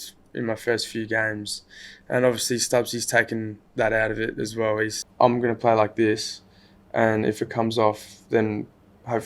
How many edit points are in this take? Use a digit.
2